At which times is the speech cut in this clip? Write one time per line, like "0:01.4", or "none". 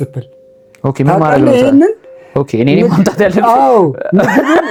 none